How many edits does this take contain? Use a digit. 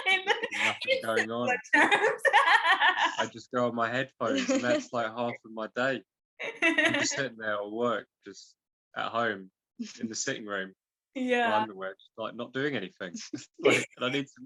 0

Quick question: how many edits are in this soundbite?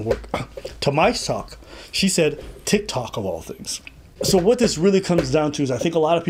1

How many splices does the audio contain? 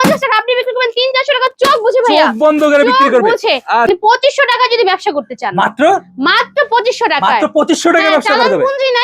1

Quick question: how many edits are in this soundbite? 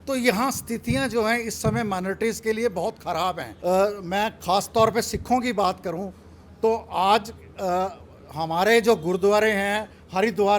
1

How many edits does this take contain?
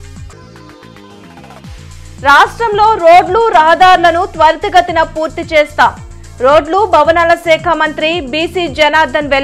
1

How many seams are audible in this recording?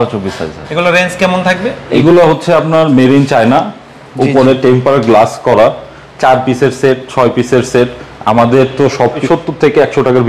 2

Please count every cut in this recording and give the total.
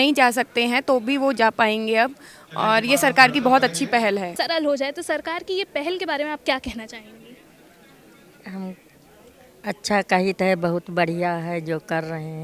1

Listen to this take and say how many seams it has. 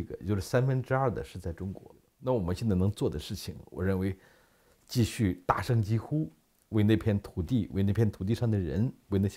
1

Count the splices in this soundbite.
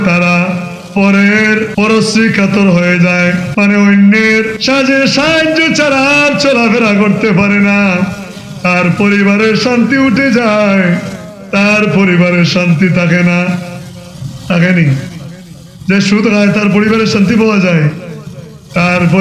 3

